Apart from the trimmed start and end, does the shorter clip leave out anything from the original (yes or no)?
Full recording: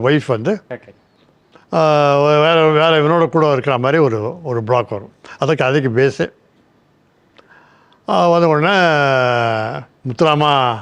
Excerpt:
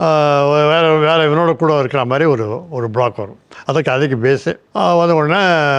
yes